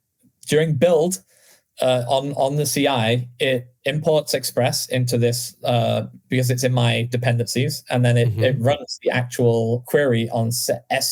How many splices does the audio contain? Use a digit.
1